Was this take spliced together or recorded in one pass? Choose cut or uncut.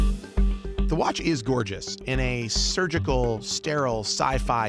uncut